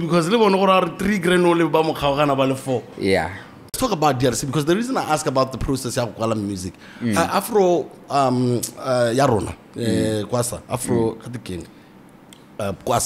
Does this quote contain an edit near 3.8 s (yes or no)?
yes